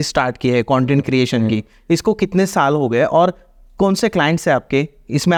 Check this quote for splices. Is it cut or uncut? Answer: uncut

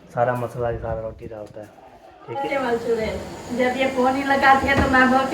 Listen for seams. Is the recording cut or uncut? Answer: cut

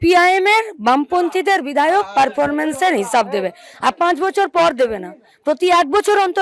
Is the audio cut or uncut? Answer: uncut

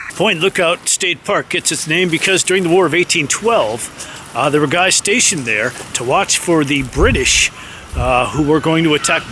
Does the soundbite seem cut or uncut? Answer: uncut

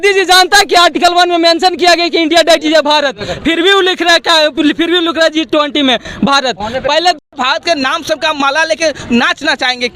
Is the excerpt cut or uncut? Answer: cut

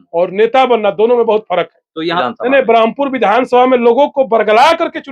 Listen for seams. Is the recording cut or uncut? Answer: cut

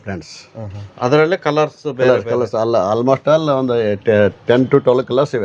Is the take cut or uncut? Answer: uncut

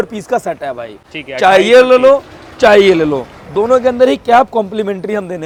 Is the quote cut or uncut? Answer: uncut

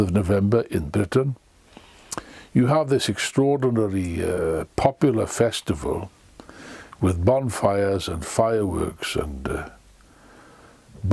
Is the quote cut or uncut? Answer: cut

